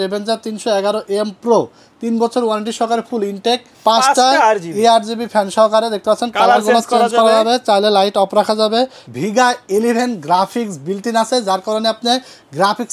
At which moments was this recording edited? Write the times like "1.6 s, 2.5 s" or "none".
3.7 s, 9.0 s